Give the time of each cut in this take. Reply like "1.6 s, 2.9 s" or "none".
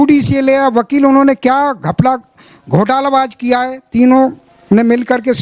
none